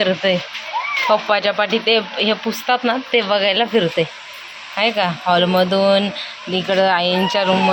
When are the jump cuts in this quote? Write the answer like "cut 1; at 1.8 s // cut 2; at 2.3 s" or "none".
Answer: none

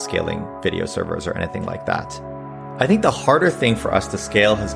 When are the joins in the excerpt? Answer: cut 1; at 2.6 s

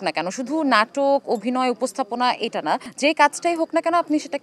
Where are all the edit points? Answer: none

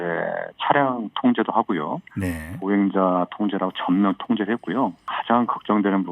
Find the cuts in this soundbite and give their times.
cut 1; at 5.1 s

